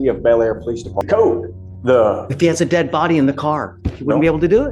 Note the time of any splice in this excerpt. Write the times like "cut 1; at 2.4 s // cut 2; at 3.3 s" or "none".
cut 1; at 1.0 s